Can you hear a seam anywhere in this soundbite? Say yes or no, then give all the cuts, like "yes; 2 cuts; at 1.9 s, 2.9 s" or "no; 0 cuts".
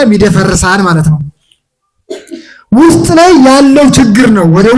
no; 0 cuts